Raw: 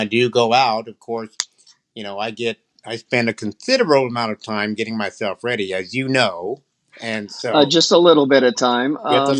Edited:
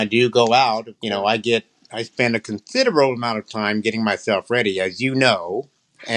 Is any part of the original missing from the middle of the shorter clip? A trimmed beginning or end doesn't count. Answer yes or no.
yes